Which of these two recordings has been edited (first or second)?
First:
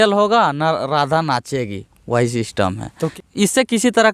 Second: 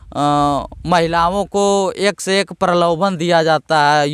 first